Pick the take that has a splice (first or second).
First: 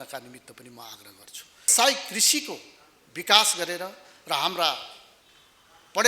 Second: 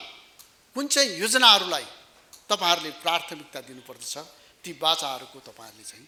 first